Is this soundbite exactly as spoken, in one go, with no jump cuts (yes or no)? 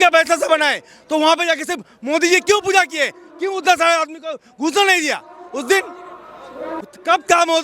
no